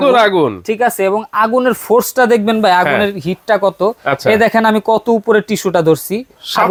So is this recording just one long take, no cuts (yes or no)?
yes